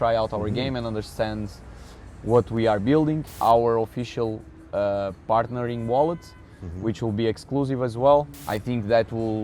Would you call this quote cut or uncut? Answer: cut